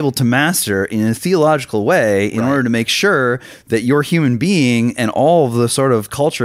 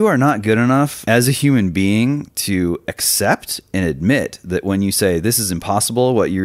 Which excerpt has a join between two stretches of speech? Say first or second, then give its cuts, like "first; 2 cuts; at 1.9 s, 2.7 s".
second; 1 cut; at 1.0 s